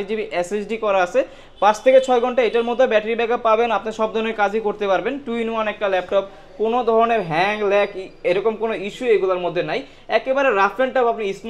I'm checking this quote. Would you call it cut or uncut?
uncut